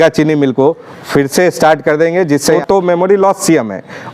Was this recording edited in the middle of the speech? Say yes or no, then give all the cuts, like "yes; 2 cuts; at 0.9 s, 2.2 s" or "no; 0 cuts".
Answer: yes; 1 cut; at 2.6 s